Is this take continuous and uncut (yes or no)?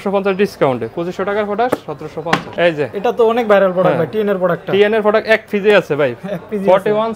yes